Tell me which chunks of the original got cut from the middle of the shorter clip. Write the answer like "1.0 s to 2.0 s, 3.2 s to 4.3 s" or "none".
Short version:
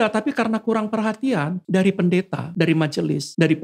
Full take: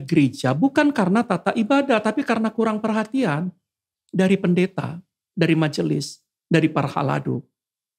3.5 s to 4.0 s, 5.3 s to 6.0 s